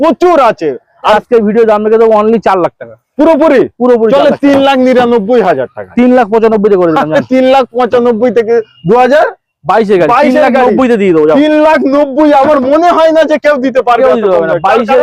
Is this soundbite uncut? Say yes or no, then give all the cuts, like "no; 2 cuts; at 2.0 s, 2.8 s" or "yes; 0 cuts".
no; 1 cut; at 1.2 s